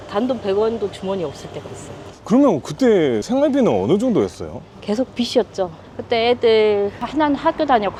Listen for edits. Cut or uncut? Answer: uncut